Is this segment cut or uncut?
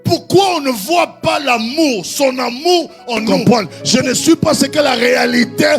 cut